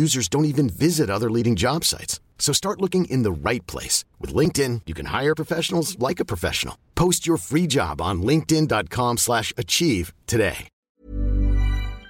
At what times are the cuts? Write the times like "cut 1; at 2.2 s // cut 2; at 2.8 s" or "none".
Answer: cut 1; at 10.8 s